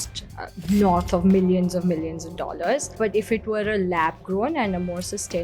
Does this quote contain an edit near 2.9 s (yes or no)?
yes